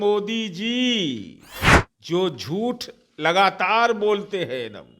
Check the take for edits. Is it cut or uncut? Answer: uncut